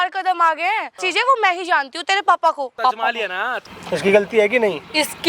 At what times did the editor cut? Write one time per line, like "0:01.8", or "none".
0:01.1
0:03.2